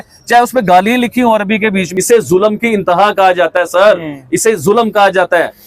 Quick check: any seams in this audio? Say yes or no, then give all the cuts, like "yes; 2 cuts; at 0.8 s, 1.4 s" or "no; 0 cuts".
yes; 1 cut; at 1.9 s